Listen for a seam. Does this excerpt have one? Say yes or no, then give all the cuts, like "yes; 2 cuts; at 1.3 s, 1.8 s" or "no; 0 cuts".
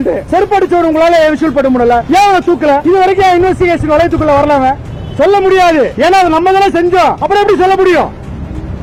no; 0 cuts